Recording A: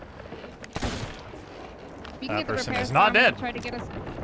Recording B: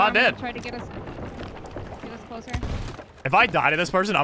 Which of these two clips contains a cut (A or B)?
B